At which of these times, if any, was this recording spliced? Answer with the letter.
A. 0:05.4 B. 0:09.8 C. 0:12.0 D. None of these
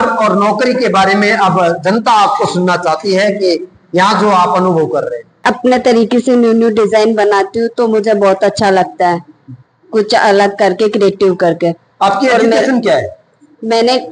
A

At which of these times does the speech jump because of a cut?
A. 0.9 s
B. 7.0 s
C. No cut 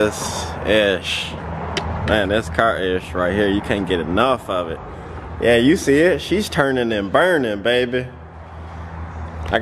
C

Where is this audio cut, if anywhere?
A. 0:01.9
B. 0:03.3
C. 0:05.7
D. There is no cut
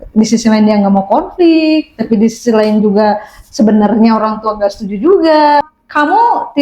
C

